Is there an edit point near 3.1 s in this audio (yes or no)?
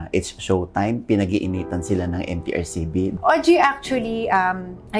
yes